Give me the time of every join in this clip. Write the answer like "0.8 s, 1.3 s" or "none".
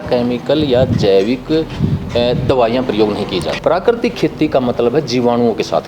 3.5 s